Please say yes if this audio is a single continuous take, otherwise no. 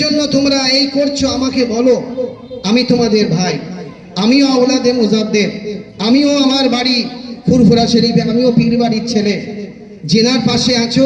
yes